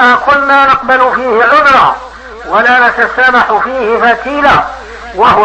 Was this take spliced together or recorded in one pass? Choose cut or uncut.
uncut